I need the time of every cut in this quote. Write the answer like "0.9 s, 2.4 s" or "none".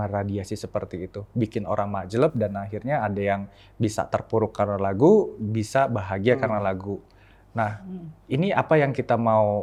none